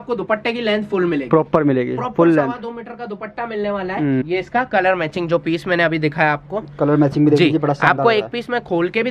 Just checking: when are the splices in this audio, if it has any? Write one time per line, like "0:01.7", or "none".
0:04.2